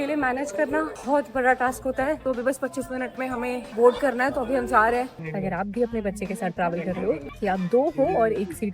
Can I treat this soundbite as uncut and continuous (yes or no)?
no